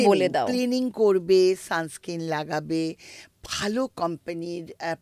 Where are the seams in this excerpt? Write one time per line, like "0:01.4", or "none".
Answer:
none